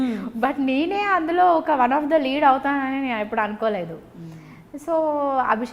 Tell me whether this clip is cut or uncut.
uncut